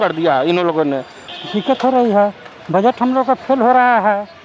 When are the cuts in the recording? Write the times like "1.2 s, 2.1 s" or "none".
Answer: 1.2 s